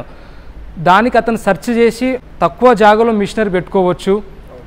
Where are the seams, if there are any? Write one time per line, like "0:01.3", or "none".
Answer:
0:02.2